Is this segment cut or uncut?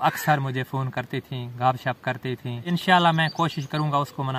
cut